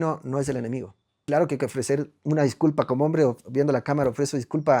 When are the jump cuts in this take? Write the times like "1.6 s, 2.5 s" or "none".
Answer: 1.1 s